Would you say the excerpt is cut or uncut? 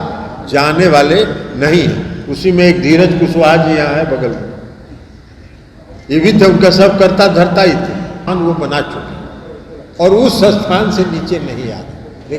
cut